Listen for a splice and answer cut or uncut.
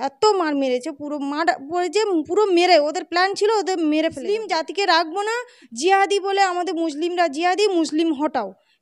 cut